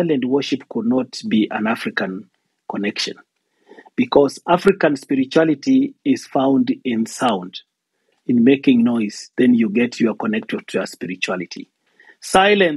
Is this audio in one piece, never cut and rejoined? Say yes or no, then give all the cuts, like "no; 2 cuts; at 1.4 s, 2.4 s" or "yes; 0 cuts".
yes; 0 cuts